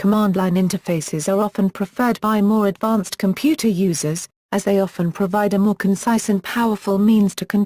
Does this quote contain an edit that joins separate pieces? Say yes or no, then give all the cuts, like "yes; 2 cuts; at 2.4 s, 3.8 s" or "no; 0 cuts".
yes; 1 cut; at 1.0 s